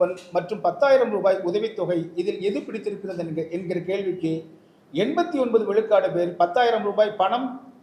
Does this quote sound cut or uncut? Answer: uncut